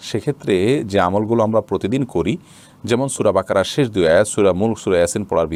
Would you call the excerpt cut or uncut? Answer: uncut